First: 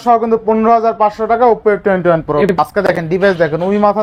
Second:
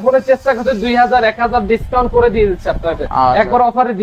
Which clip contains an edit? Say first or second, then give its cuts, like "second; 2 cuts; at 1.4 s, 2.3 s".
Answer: first; 1 cut; at 2.5 s